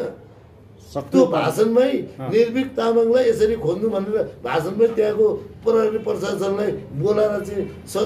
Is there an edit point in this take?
no; 0 cuts

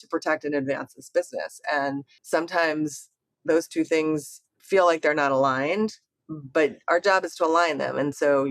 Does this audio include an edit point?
yes; 1 cut; at 2.1 s

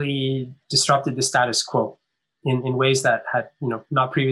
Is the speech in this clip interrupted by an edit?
no; 0 cuts

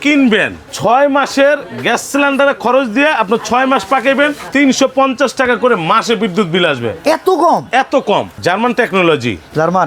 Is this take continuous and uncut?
no; 1 cut; at 8.4 s

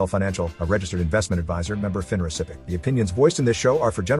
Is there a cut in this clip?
yes; 1 cut; at 2.6 s

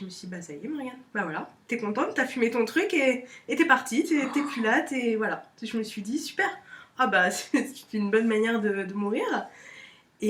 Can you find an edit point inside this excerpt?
no; 0 cuts

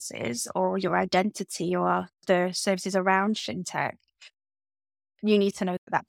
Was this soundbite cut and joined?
no; 0 cuts

